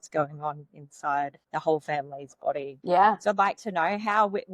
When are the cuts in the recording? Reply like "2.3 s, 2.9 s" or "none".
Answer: 1.4 s, 2.7 s